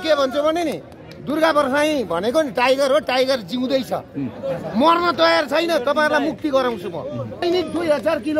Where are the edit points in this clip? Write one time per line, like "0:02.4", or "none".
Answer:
0:07.4